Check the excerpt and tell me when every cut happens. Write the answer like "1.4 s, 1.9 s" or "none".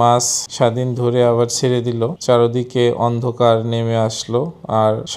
2.1 s